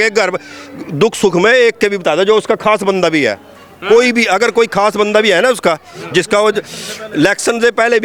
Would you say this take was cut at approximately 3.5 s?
no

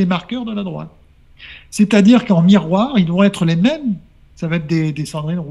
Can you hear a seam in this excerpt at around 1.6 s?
no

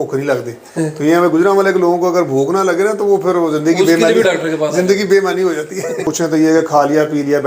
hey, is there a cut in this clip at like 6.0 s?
yes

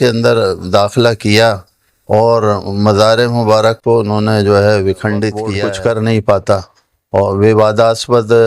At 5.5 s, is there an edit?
yes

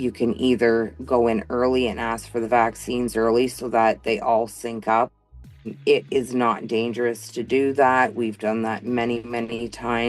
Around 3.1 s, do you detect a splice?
yes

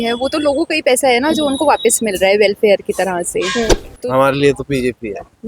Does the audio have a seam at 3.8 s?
yes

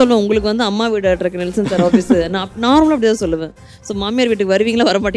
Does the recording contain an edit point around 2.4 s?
no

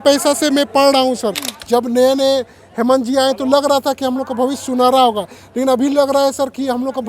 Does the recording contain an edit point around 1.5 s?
yes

